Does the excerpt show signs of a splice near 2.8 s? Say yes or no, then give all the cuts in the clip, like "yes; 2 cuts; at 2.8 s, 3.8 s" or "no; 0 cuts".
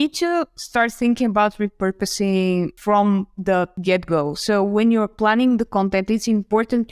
yes; 2 cuts; at 2.8 s, 3.7 s